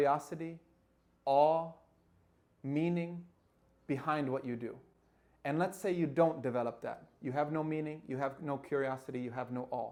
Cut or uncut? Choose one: uncut